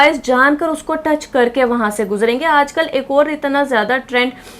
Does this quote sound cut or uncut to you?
uncut